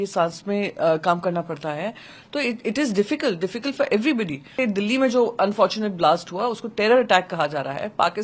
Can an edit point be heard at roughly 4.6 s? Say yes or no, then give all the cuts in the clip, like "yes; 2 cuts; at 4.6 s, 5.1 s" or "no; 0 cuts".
yes; 1 cut; at 4.6 s